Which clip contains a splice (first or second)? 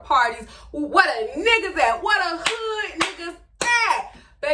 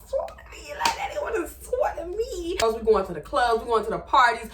second